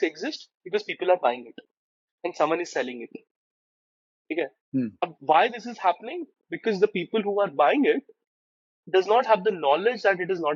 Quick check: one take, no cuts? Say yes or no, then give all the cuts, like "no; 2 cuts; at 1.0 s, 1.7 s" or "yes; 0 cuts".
yes; 0 cuts